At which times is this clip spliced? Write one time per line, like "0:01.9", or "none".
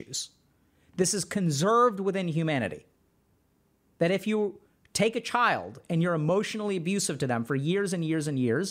none